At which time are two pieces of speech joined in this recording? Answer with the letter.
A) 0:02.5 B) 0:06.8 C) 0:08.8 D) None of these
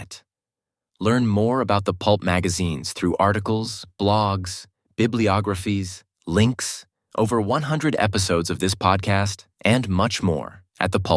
D